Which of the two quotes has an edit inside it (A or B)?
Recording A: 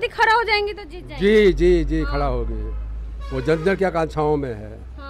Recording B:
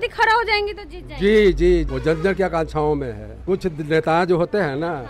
B